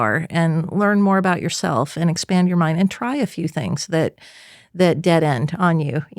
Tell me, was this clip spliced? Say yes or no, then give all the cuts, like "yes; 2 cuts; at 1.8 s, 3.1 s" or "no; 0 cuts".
no; 0 cuts